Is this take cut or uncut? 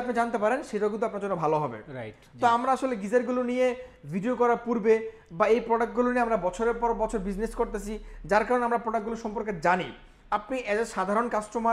uncut